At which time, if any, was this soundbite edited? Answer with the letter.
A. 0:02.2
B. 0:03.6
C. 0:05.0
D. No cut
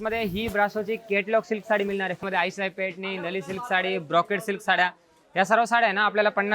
A